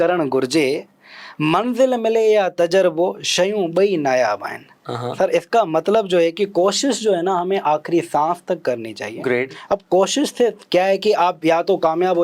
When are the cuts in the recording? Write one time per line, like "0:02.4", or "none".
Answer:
none

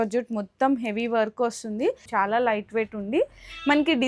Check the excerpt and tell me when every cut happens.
0:02.0

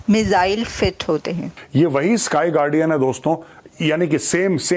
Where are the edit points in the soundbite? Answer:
0:01.6

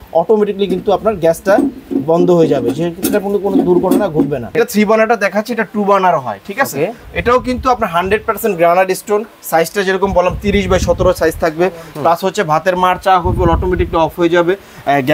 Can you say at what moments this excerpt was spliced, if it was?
0:04.6

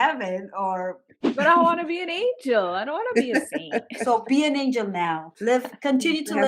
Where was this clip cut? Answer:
0:01.2

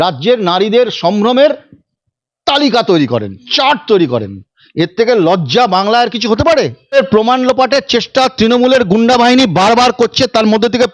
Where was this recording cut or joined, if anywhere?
0:06.9

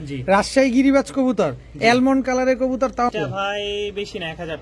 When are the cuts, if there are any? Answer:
0:03.1

